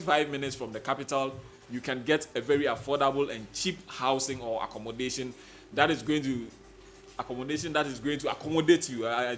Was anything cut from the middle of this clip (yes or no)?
no